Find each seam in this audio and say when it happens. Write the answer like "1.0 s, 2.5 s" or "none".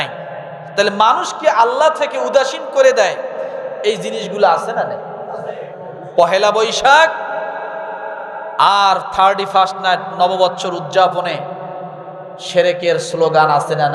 5.6 s